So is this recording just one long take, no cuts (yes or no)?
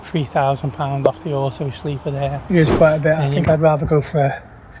no